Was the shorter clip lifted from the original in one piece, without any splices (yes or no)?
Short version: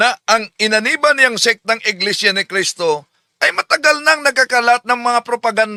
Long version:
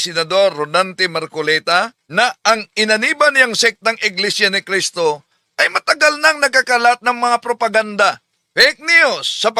yes